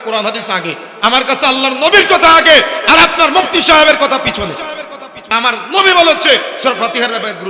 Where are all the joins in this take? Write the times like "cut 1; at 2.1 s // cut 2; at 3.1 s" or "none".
cut 1; at 5.3 s